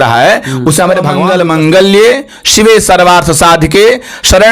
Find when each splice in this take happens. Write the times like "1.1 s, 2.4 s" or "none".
1.2 s